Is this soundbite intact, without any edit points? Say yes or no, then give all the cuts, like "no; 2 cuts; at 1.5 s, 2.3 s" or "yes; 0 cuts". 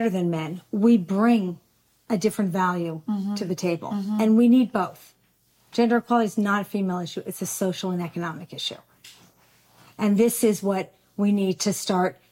yes; 0 cuts